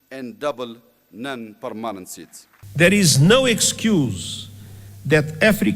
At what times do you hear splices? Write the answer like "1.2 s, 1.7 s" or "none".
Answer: 2.6 s